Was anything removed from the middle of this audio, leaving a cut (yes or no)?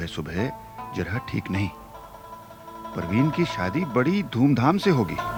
no